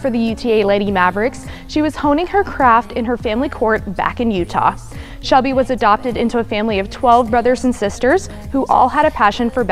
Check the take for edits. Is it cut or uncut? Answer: uncut